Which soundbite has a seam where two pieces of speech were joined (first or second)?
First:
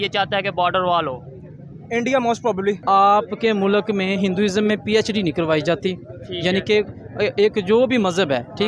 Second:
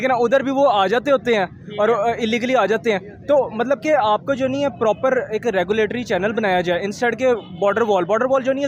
first